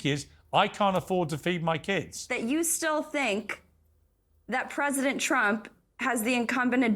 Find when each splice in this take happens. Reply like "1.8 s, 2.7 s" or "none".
2.2 s